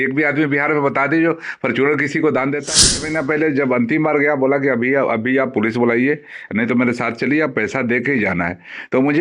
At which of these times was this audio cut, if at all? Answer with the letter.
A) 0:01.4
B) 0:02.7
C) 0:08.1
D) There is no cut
B